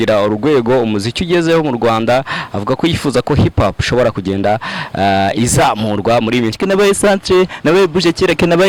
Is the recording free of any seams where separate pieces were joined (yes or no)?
no